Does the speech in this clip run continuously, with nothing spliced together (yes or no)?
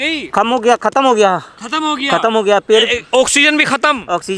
yes